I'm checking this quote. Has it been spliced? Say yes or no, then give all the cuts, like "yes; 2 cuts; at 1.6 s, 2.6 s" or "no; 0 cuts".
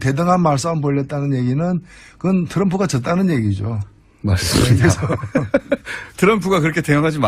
yes; 1 cut; at 1.9 s